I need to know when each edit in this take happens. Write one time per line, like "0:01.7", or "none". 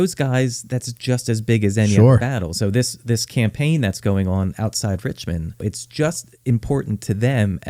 0:05.8